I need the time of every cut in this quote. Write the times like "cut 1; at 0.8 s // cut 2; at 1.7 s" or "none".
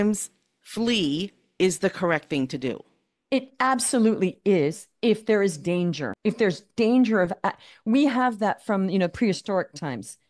cut 1; at 6.1 s